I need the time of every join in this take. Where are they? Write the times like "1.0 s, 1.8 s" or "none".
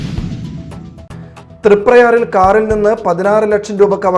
1.0 s